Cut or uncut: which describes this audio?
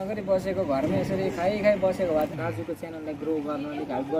cut